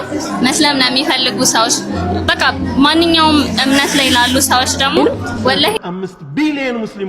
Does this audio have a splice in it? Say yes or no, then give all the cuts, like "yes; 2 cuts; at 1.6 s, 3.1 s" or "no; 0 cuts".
yes; 1 cut; at 5.8 s